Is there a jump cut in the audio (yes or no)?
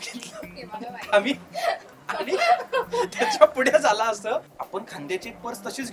yes